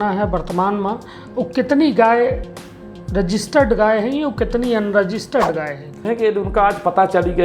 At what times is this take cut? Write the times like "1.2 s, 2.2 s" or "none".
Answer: 6.1 s